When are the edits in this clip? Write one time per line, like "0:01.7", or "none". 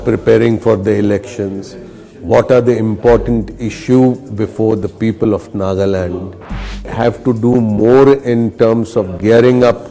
0:06.9